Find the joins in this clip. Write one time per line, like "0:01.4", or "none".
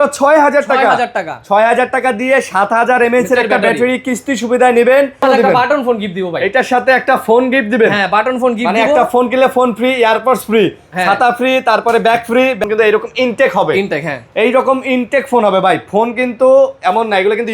0:05.2
0:12.6